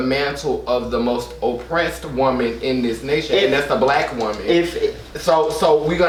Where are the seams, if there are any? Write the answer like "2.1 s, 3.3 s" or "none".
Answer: none